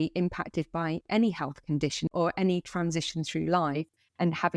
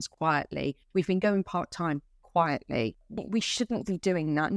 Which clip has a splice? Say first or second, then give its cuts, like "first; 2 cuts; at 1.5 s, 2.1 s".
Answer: first; 1 cut; at 2.1 s